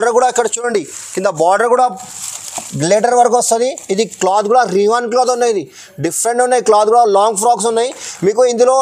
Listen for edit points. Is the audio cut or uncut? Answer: uncut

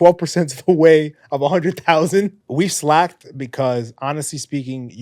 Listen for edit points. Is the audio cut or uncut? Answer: cut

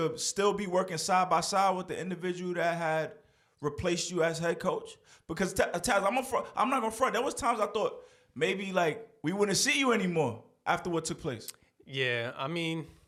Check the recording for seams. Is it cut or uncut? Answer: uncut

